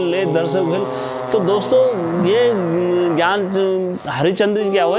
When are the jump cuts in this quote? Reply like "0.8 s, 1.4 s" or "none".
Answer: none